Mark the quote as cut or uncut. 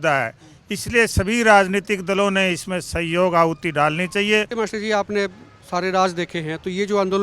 cut